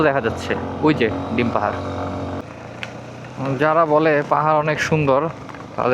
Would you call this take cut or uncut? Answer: cut